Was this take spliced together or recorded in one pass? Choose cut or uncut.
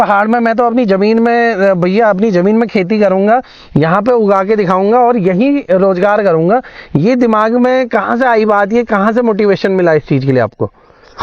uncut